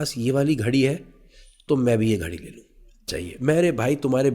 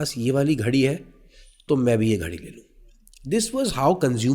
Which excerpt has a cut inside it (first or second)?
first